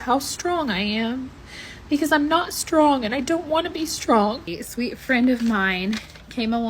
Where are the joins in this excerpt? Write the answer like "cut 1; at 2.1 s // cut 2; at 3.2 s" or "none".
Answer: cut 1; at 4.4 s

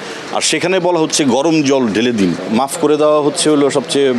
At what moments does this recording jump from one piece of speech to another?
cut 1; at 2.4 s

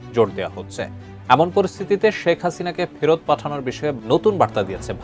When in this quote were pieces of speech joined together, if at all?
cut 1; at 3.9 s

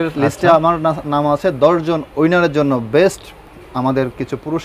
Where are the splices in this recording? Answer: none

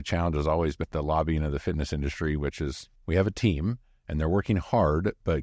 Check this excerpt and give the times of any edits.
cut 1; at 0.8 s // cut 2; at 2.9 s

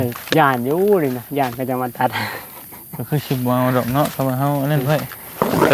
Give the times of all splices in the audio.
none

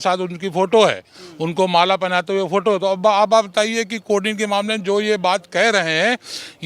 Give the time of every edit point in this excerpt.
none

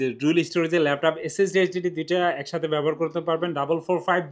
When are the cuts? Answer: none

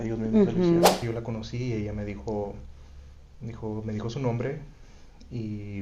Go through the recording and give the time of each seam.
cut 1; at 1.0 s

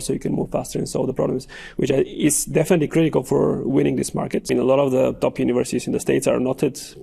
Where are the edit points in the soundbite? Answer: cut 1; at 4.5 s

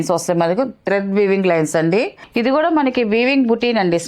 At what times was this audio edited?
cut 1; at 2.2 s

